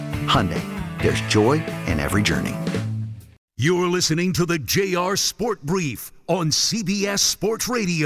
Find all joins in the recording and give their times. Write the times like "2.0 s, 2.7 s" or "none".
3.4 s